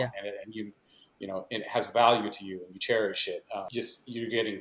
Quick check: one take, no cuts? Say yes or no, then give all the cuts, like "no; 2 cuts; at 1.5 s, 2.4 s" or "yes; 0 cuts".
no; 1 cut; at 3.7 s